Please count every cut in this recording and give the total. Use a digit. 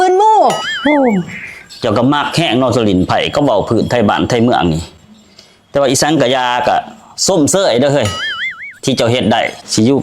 0